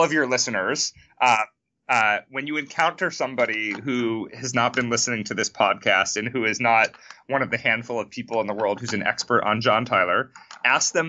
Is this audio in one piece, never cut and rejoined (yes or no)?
yes